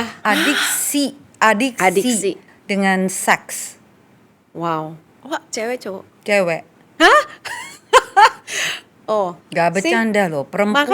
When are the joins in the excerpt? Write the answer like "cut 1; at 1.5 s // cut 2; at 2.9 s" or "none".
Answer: cut 1; at 2.4 s